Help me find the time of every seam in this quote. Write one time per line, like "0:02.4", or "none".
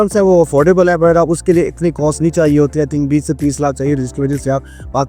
none